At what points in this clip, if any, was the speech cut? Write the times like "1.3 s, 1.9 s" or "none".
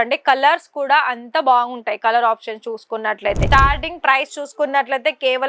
3.4 s

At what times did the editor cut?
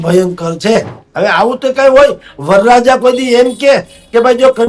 1.0 s

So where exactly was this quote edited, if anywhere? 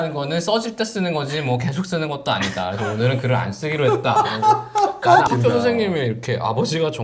5.3 s

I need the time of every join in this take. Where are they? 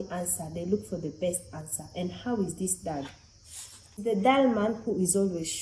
4.0 s

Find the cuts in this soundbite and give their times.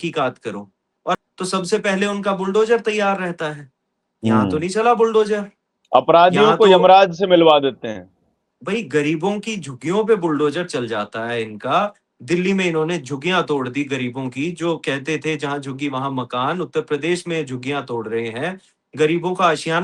1.2 s

